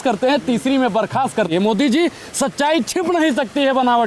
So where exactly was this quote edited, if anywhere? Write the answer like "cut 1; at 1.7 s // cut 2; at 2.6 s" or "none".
cut 1; at 1.5 s